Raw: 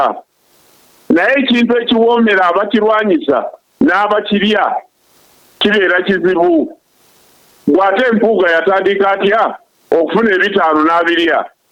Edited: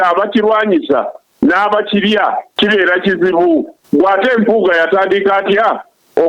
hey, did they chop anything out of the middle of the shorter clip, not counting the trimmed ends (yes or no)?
yes